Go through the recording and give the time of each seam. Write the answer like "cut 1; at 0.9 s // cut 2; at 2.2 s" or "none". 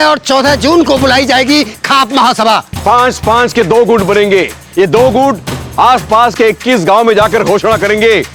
none